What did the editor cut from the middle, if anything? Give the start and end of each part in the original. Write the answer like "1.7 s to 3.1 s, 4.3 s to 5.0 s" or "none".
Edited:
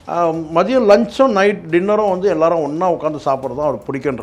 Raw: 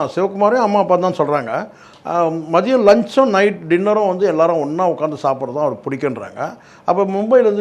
none